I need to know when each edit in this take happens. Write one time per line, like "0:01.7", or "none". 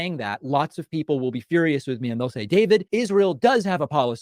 none